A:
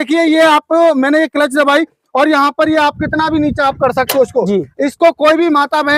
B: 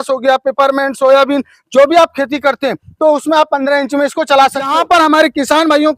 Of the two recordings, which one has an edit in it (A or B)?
B